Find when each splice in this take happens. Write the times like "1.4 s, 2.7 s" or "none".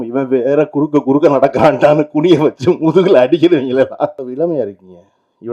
4.3 s